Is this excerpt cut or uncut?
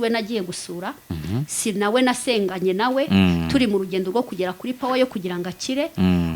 uncut